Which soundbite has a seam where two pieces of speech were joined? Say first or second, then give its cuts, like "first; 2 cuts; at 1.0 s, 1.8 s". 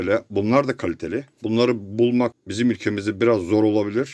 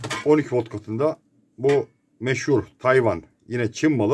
first; 2 cuts; at 1.3 s, 2.4 s